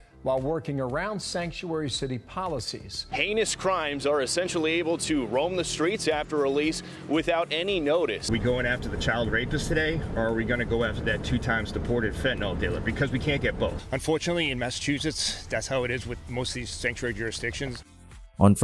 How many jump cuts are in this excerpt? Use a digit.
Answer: 0